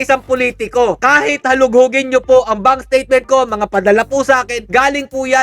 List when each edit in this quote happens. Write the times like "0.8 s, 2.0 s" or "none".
none